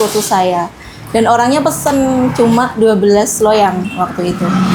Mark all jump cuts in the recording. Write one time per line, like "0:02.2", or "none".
none